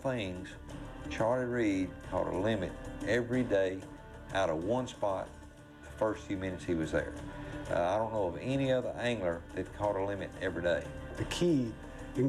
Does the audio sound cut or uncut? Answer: uncut